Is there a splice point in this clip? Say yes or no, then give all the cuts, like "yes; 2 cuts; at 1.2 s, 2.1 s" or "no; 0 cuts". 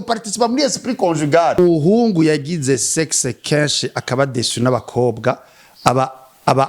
yes; 1 cut; at 1.6 s